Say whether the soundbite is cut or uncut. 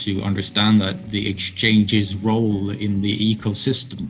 uncut